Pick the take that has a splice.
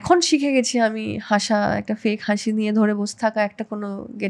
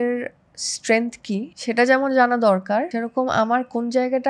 second; 2 cuts; at 1.5 s, 2.9 s

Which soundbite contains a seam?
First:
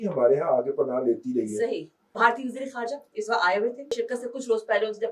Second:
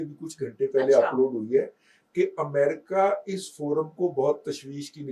first; 2 cuts; at 2.1 s, 4.0 s

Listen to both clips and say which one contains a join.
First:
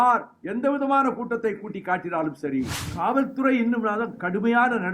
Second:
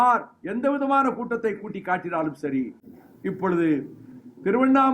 first; 1 cut; at 2.8 s

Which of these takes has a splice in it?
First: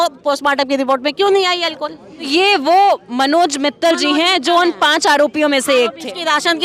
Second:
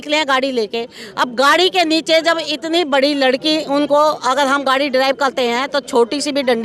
first; 1 cut; at 2.3 s

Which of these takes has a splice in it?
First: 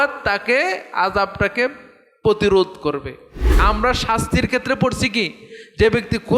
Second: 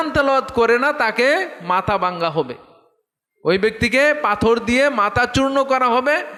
first; 1 cut; at 3.6 s

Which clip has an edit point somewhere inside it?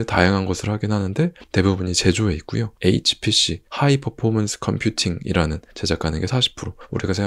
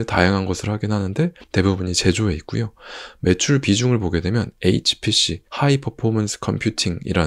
first; 2 cuts; at 2.7 s, 5.7 s

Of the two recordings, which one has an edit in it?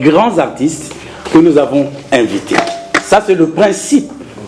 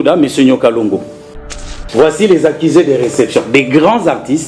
second; 1 cut; at 1.3 s

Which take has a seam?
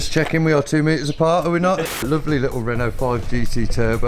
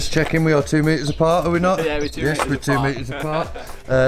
first; 1 cut; at 2.0 s

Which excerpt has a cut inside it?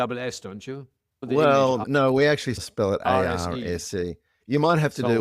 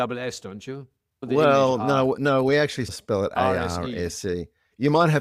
first; 1 cut; at 1.8 s

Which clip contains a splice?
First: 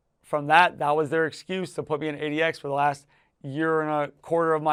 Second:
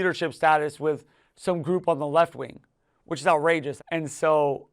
second; 1 cut; at 3.8 s

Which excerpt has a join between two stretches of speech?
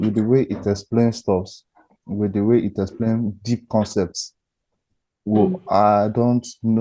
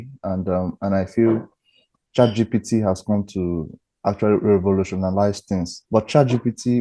second; 1 cut; at 5.7 s

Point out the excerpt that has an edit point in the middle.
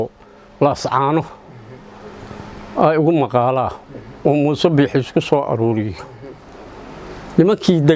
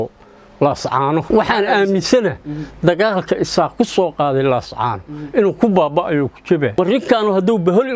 second; 2 cuts; at 1.2 s, 6.8 s

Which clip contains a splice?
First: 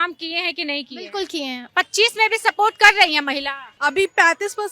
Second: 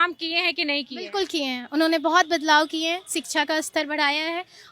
first; 2 cuts; at 1.7 s, 3.7 s

